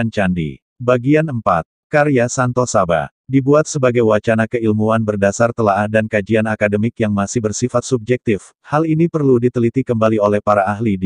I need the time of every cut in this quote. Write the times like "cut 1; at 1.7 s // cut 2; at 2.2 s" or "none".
cut 1; at 1.3 s

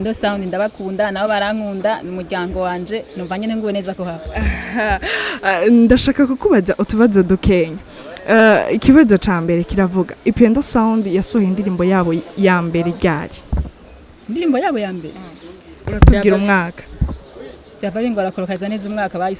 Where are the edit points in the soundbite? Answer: none

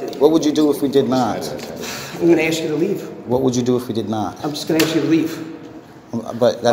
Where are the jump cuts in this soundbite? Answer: none

